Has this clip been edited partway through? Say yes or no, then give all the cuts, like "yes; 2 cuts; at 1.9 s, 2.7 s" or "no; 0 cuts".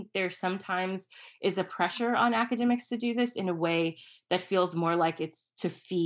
no; 0 cuts